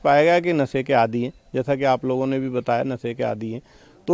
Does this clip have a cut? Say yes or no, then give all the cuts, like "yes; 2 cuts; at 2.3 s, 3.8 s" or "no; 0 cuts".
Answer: no; 0 cuts